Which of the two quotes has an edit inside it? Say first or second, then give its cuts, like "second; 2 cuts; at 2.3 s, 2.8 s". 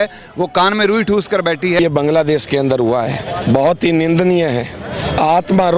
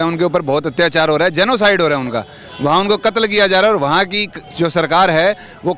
first; 1 cut; at 1.8 s